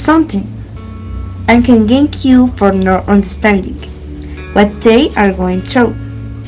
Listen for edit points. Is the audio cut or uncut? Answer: uncut